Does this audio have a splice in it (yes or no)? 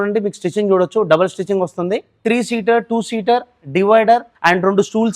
yes